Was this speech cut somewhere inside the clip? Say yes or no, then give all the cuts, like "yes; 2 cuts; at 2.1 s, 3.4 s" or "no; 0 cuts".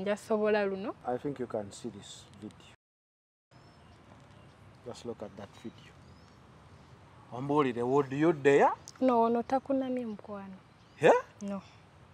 yes; 1 cut; at 1.0 s